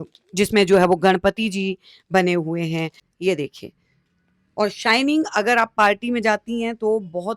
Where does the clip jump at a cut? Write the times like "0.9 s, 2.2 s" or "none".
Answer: 3.0 s